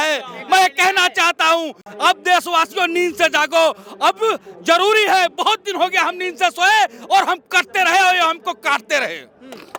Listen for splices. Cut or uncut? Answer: uncut